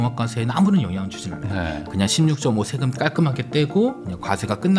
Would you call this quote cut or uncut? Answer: uncut